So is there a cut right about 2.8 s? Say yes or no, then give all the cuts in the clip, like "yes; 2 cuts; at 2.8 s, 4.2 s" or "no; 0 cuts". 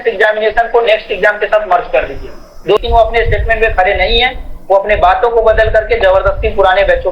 yes; 1 cut; at 2.8 s